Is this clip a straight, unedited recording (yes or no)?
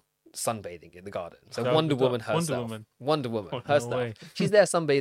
yes